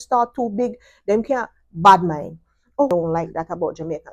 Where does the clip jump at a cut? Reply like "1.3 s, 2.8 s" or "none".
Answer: 2.9 s